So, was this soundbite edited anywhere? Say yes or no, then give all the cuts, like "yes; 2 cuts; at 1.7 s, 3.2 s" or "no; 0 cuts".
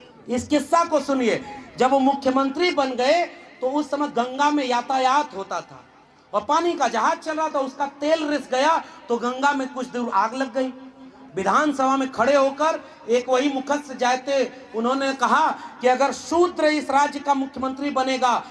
no; 0 cuts